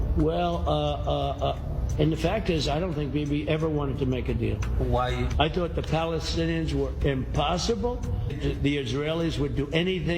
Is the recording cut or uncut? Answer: cut